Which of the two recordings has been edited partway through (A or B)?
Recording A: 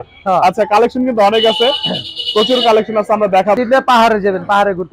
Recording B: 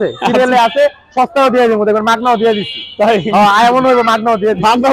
A